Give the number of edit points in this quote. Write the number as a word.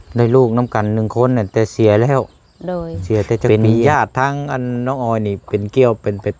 one